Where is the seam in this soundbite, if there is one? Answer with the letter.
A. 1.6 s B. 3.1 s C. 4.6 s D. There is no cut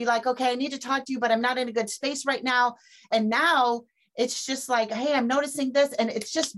B